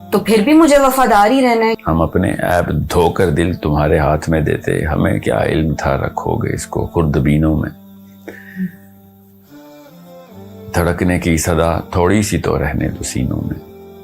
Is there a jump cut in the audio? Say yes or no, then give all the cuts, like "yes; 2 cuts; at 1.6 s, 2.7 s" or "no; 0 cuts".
yes; 1 cut; at 1.8 s